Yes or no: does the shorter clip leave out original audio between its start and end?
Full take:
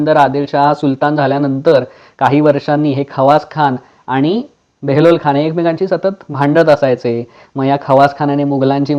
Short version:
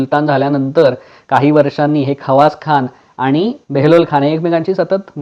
yes